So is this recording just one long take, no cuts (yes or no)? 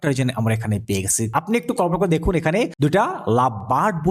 no